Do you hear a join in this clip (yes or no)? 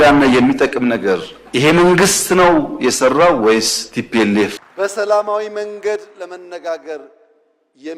yes